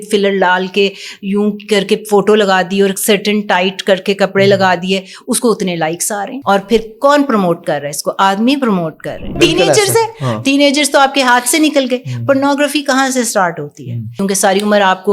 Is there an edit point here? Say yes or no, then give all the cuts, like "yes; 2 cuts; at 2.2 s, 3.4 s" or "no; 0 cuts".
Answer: yes; 3 cuts; at 6.3 s, 9.3 s, 14.2 s